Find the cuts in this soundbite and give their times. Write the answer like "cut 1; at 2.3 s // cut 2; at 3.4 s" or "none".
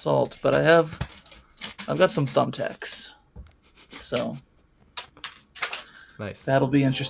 none